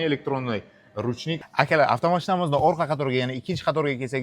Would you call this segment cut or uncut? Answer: cut